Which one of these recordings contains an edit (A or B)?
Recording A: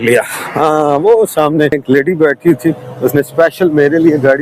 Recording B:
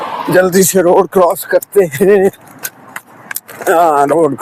A